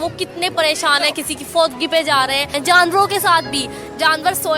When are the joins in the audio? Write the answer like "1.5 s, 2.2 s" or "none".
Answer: 2.5 s